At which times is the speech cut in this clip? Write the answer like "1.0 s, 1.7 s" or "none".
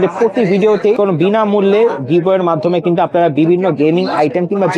0.9 s